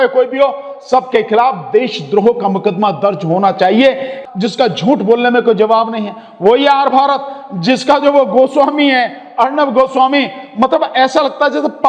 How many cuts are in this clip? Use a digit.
1